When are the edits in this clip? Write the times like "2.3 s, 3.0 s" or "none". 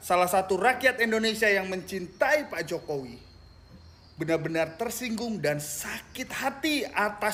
none